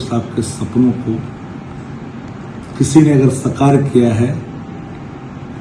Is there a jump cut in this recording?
no; 0 cuts

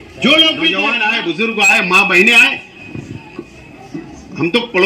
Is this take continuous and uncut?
no; 1 cut; at 0.9 s

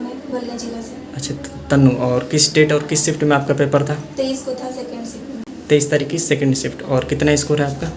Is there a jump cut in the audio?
no; 0 cuts

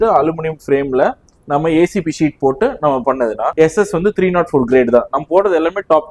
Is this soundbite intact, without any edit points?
no; 1 cut; at 3.5 s

